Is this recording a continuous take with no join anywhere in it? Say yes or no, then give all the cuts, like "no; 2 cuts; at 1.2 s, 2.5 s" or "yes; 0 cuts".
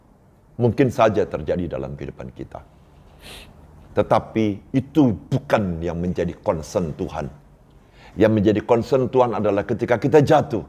yes; 0 cuts